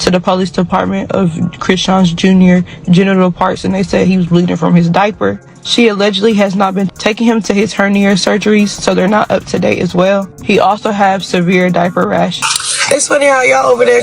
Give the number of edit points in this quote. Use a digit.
1